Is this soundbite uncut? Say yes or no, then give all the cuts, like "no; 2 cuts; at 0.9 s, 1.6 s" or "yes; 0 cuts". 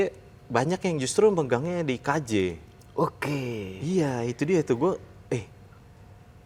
yes; 0 cuts